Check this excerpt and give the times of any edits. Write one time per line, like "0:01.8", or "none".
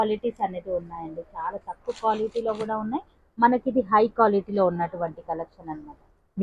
none